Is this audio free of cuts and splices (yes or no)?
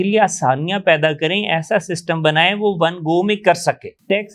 yes